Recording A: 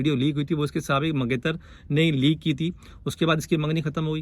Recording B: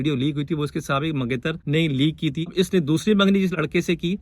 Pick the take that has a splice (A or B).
B